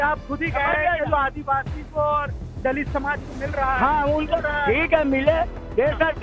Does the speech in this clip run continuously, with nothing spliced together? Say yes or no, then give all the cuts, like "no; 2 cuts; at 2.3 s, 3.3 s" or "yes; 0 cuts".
no; 1 cut; at 4.4 s